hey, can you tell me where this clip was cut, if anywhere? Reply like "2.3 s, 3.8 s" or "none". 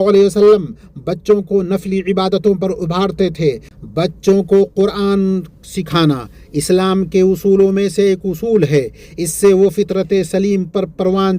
3.7 s